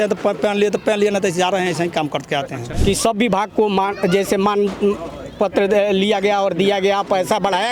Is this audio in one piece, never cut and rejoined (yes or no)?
no